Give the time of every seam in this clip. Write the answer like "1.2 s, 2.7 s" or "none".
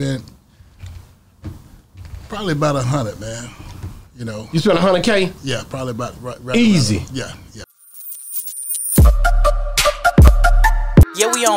7.6 s